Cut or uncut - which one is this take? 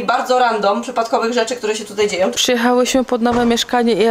cut